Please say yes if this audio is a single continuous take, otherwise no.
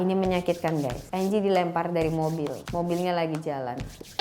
no